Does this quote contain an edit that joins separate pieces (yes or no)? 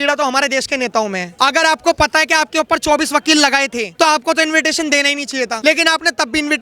yes